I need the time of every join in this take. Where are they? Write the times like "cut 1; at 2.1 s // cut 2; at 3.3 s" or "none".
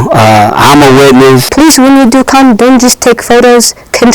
cut 1; at 1.5 s